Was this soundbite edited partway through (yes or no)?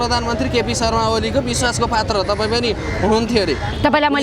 no